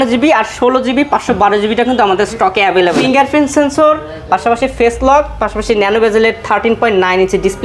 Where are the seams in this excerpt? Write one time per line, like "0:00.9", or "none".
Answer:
0:03.0